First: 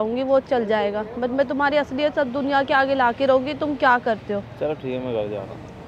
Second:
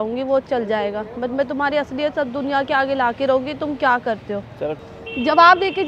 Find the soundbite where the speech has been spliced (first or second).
second